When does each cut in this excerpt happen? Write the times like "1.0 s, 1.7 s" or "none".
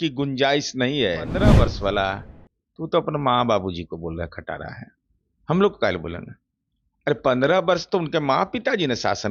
1.4 s